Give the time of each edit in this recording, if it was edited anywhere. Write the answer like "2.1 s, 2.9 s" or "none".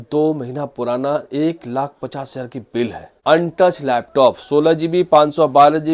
3.1 s